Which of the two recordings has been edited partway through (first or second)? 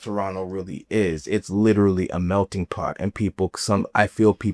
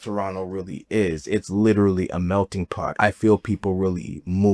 second